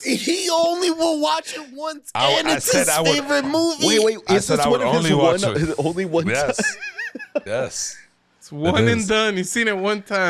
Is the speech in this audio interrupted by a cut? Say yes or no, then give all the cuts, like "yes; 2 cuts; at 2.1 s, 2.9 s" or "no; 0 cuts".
no; 0 cuts